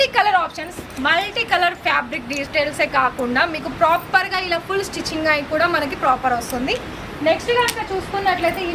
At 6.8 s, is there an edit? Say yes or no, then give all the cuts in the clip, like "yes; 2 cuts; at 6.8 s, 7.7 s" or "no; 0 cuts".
no; 0 cuts